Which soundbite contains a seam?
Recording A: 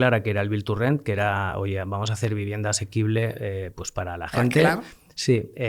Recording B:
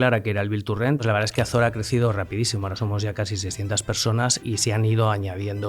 B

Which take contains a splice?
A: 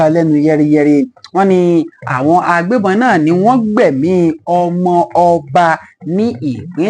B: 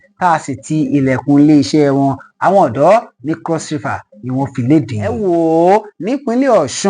B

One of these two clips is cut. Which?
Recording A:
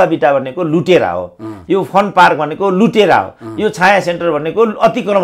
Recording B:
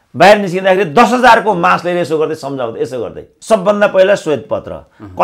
B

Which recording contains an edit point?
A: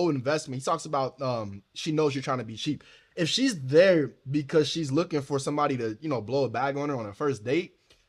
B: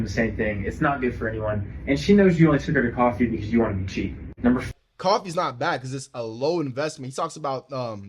B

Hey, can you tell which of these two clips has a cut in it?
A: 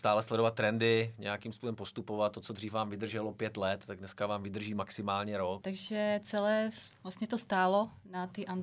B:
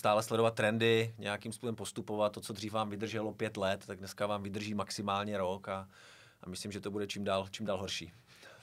A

